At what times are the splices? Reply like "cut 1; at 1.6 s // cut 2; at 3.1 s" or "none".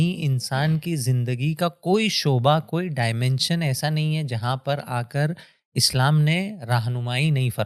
none